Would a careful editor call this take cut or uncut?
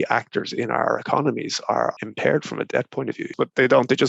cut